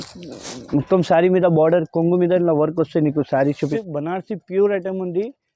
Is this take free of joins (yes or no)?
no